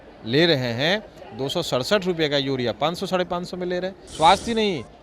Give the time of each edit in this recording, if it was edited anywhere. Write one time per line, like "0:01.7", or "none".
0:04.0